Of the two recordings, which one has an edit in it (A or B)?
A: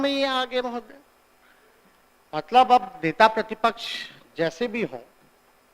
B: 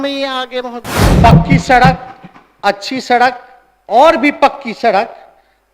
B